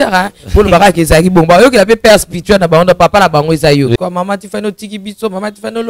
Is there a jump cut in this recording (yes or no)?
yes